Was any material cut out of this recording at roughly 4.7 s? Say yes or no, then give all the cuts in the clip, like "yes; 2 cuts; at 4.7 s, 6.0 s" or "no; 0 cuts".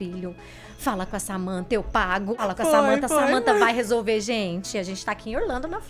no; 1 cut; at 2.3 s